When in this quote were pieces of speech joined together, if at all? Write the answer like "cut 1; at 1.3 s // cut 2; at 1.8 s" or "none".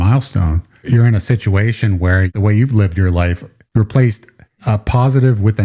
cut 1; at 0.8 s // cut 2; at 2.3 s // cut 3; at 4.6 s